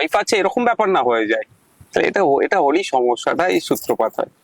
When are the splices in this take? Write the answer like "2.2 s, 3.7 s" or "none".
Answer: none